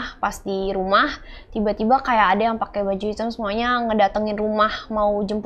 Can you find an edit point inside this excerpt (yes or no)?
no